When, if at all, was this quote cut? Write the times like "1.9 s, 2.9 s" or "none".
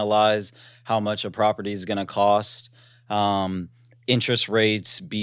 none